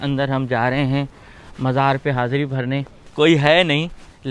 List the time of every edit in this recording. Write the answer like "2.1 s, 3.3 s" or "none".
3.0 s